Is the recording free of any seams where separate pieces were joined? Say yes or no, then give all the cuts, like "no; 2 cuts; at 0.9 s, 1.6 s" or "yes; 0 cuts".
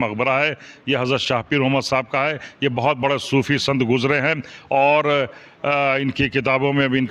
yes; 0 cuts